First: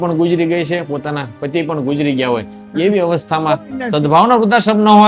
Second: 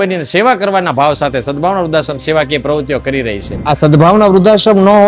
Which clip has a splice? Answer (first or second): second